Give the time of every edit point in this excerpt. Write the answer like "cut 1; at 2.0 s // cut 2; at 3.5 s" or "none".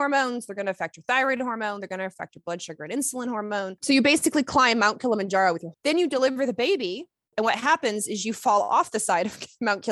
cut 1; at 3.8 s // cut 2; at 5.7 s // cut 3; at 7.2 s